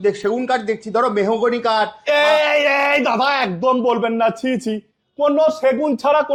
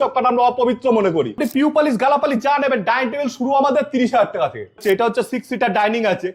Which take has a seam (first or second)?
second